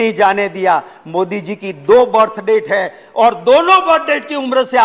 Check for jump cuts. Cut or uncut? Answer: uncut